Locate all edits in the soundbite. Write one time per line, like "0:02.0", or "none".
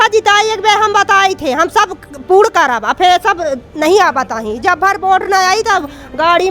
none